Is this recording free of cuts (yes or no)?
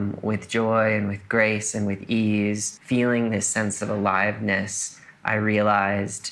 no